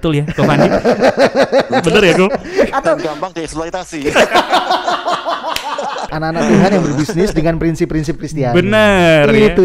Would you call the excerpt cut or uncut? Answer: cut